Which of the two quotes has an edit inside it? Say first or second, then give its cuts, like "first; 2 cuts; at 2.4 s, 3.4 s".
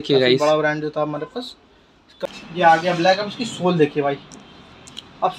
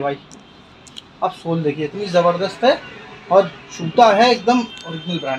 first; 1 cut; at 2.3 s